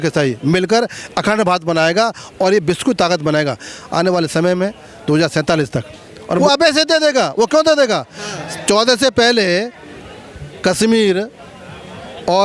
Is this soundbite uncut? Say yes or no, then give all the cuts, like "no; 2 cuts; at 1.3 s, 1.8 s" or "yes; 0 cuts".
no; 1 cut; at 6.4 s